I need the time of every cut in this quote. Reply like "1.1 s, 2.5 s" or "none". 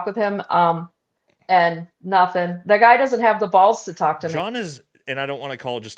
4.3 s